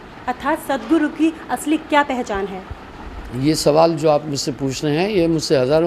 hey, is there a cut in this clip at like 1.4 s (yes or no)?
no